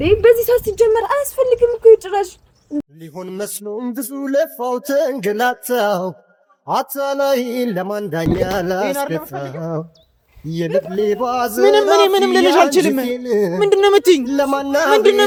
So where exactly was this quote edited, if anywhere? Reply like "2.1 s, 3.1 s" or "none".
none